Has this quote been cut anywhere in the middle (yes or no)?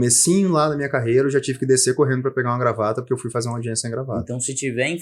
no